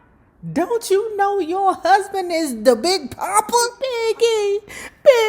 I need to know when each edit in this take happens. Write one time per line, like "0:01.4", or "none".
0:03.8